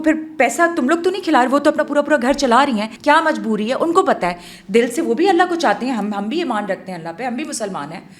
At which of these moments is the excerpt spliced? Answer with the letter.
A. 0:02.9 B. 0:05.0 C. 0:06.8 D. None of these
A